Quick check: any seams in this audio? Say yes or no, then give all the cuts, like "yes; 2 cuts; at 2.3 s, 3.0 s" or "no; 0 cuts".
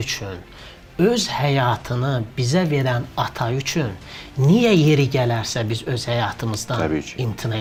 no; 0 cuts